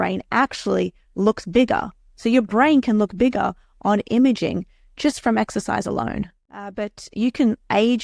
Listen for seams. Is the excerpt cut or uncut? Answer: cut